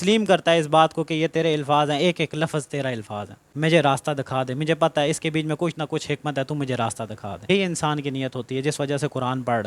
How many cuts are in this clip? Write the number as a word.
two